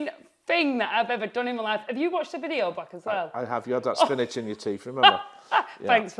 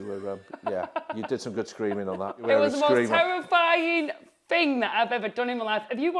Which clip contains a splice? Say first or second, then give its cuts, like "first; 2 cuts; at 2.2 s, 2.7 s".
second; 1 cut; at 2.4 s